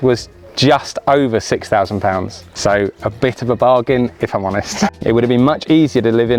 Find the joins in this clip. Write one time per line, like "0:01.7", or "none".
0:02.4
0:04.9